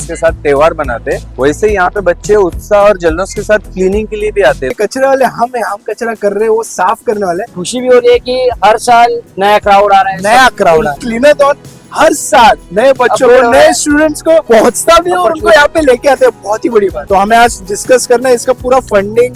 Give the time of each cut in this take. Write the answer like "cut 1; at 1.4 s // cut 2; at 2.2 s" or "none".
cut 1; at 4.8 s // cut 2; at 7.5 s // cut 3; at 11.0 s // cut 4; at 17.0 s